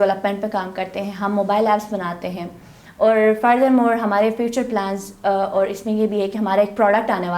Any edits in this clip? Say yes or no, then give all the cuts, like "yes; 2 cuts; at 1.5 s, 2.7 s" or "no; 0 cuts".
no; 0 cuts